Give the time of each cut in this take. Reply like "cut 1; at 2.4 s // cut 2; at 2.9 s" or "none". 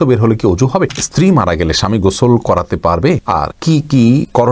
cut 1; at 1.1 s